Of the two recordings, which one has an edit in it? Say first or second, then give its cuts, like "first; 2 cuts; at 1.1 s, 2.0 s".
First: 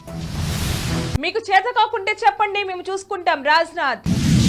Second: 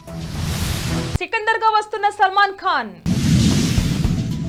first; 1 cut; at 1.1 s